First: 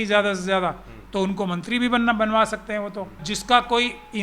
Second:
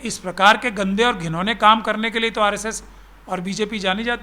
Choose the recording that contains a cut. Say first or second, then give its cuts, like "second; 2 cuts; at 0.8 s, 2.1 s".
first; 1 cut; at 3.3 s